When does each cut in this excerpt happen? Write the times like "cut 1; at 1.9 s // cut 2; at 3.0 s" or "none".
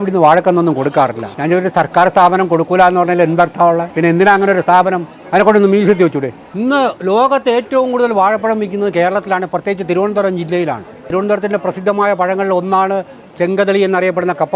cut 1; at 1.3 s // cut 2; at 3.9 s // cut 3; at 5.1 s // cut 4; at 6.4 s // cut 5; at 11.1 s